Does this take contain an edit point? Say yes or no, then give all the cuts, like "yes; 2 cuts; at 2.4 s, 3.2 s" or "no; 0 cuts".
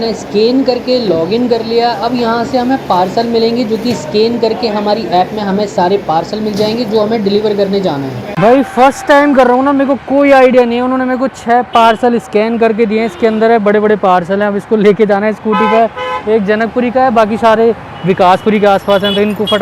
no; 0 cuts